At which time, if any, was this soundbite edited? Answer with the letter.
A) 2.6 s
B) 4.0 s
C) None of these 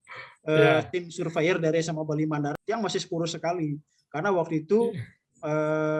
A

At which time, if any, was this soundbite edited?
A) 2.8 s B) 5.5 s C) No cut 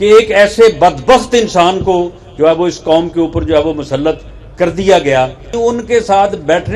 B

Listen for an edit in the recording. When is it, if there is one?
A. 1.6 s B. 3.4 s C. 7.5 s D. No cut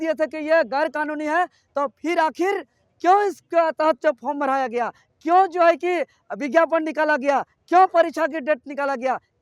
D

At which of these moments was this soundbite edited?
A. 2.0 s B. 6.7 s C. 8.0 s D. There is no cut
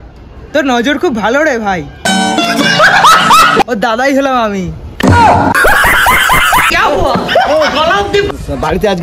B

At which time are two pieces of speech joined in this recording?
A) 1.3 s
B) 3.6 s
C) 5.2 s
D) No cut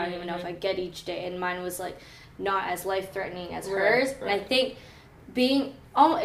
D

